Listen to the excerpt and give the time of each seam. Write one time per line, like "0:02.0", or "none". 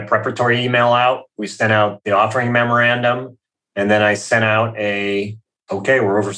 0:02.0